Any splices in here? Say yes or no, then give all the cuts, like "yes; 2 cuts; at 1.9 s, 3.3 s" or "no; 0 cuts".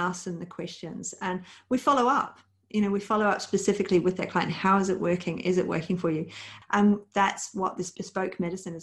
yes; 2 cuts; at 6.4 s, 7.9 s